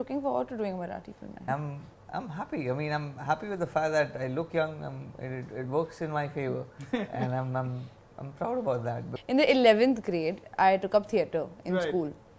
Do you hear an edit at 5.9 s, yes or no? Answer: no